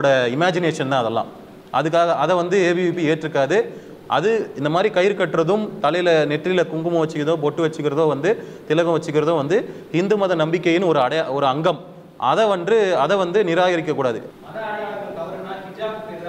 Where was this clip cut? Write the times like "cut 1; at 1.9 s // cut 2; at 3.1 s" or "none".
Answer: cut 1; at 14.3 s